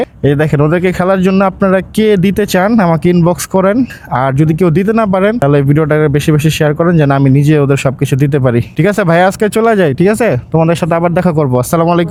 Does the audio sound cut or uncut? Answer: uncut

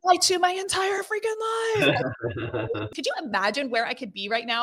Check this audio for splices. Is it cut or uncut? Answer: cut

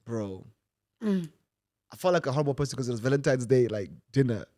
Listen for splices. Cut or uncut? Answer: uncut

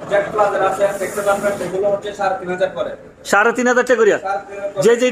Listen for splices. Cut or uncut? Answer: uncut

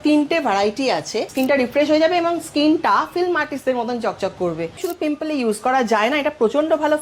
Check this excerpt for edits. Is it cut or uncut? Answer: cut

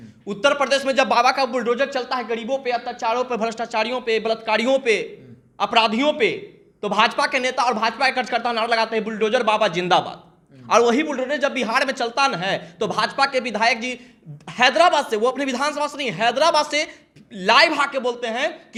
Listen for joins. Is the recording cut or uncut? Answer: uncut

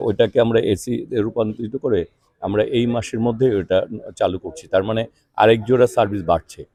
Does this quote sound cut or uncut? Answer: uncut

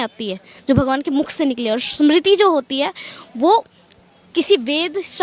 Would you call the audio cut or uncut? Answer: uncut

